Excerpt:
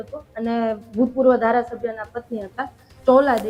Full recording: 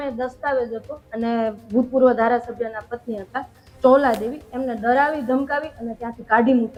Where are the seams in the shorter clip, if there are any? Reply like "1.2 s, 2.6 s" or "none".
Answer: none